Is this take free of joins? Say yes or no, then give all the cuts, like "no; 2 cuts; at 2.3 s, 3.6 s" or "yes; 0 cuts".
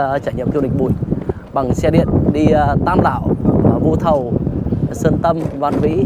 yes; 0 cuts